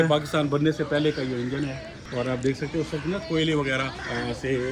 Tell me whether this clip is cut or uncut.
uncut